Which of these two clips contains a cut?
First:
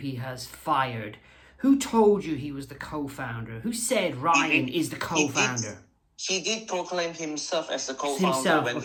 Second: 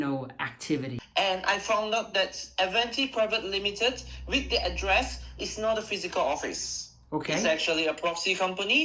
second; 1 cut; at 1.0 s

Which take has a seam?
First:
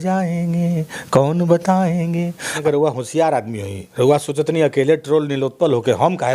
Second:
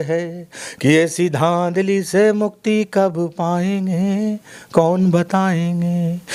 first; 1 cut; at 2.5 s

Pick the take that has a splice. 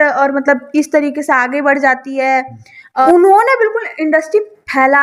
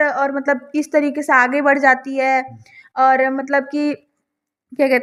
first; 1 cut; at 3.1 s

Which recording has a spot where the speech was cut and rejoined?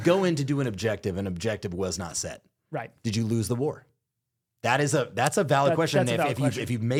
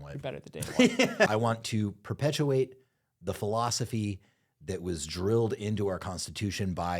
second; 1 cut; at 1.3 s

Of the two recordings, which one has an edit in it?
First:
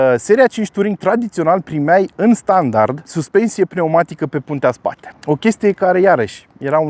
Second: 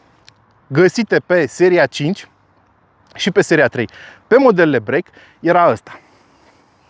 first; 2 cuts; at 3.1 s, 5.1 s

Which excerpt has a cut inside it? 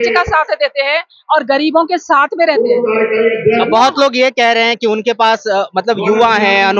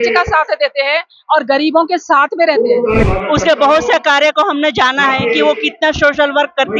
second; 1 cut; at 3.1 s

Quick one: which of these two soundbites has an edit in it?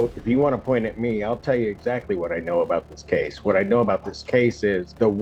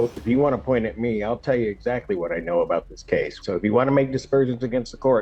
second; 1 cut; at 3.3 s

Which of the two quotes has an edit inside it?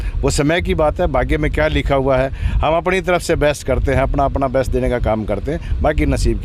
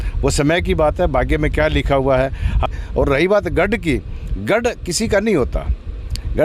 second; 1 cut; at 2.6 s

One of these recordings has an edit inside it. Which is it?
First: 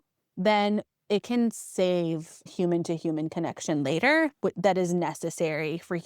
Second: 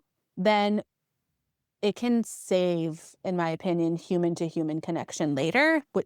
first; 2 cuts; at 0.9 s, 2.5 s

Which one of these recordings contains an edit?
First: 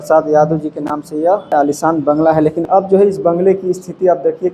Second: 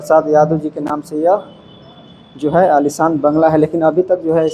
first; 2 cuts; at 1.5 s, 2.6 s

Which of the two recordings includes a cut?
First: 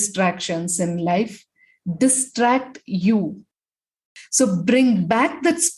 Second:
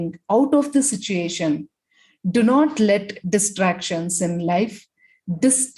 first; 1 cut; at 4.2 s

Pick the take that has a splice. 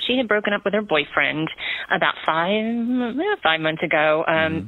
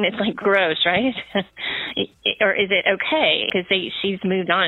second; 1 cut; at 3.5 s

